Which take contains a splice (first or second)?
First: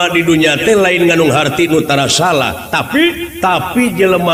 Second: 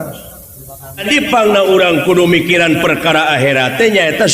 second